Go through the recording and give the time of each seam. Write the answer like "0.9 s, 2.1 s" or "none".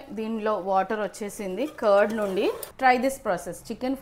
2.7 s